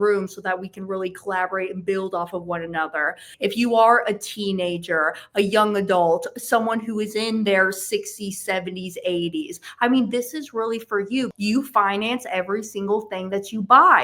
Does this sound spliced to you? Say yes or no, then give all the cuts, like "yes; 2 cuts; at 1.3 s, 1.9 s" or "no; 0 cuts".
yes; 2 cuts; at 3.3 s, 11.3 s